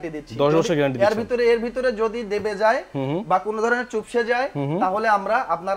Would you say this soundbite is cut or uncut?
uncut